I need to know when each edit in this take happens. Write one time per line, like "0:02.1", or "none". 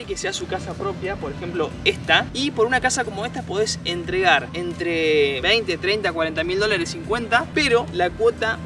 0:02.3
0:04.5
0:07.5